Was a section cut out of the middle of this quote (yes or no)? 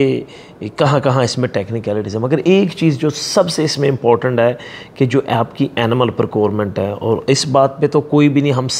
no